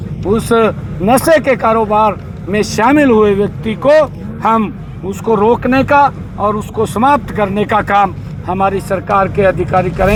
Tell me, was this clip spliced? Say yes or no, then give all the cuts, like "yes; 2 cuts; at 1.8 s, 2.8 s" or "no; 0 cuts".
no; 0 cuts